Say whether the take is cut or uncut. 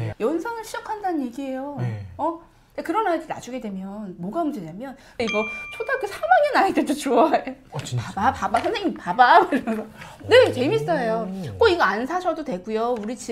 cut